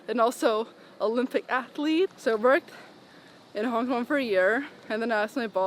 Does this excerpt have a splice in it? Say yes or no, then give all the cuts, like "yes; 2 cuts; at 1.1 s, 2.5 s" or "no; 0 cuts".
yes; 1 cut; at 2.2 s